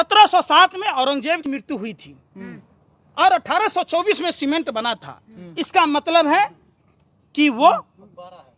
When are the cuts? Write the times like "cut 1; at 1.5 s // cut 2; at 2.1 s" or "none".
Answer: cut 1; at 1.5 s